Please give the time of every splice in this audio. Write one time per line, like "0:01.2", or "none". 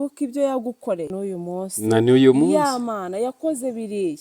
none